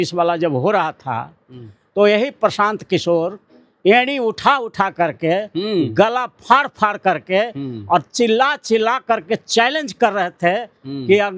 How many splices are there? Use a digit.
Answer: 0